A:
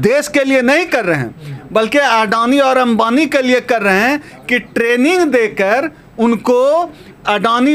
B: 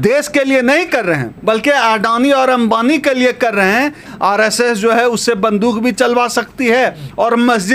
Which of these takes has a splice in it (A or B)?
B